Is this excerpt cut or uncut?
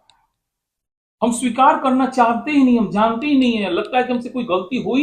uncut